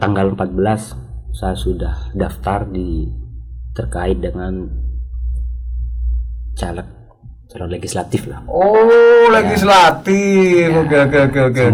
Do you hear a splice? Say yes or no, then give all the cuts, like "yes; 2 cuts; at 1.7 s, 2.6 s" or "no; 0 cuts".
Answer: no; 0 cuts